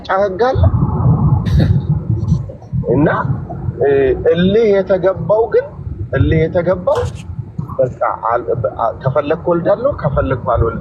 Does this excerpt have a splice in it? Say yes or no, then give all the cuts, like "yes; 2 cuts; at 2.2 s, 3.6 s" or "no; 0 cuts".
no; 0 cuts